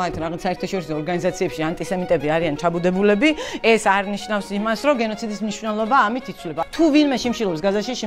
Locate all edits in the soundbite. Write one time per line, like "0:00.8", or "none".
0:06.5

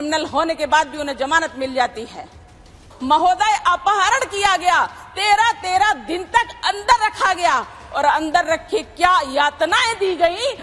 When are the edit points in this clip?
0:02.9

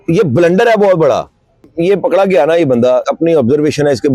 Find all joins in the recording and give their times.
0:01.7
0:03.0

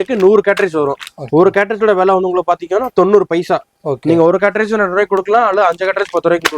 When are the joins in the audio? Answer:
none

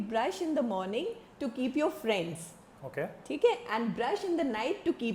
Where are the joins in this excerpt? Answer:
none

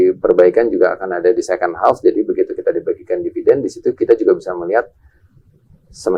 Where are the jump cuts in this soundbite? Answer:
none

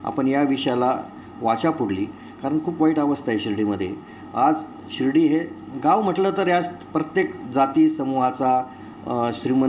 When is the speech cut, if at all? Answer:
none

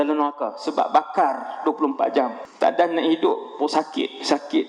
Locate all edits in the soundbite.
0:02.4

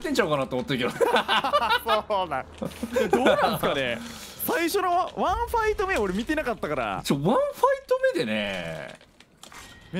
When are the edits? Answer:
none

